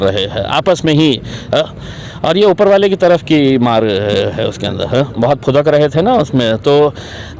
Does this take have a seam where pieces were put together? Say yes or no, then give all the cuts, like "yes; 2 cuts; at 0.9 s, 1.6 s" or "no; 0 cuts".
no; 0 cuts